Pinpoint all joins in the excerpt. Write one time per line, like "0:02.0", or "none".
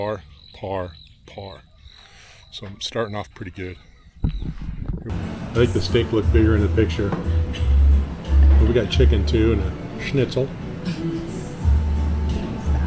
0:05.1